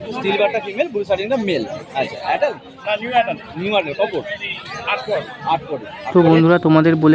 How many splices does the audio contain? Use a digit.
1